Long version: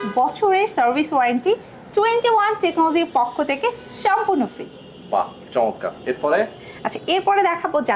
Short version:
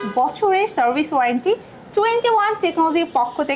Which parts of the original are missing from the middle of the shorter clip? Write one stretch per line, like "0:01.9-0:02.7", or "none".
none